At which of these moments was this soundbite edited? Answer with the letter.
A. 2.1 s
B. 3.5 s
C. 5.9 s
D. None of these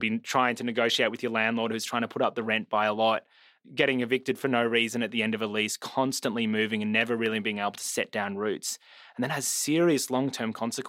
B